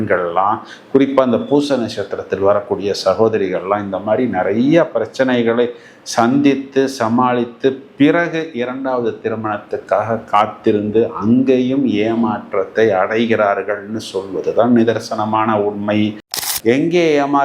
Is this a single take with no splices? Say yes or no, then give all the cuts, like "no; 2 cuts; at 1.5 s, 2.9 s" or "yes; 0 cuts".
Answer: no; 1 cut; at 16.4 s